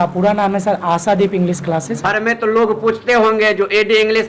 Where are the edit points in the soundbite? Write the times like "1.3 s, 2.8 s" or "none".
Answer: 1.9 s